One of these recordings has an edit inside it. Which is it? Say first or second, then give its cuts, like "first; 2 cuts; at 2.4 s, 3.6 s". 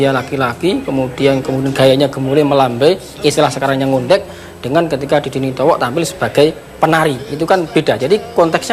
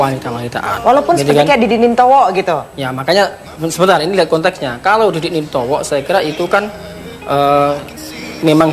first; 1 cut; at 6.9 s